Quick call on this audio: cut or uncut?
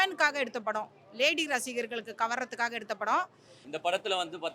cut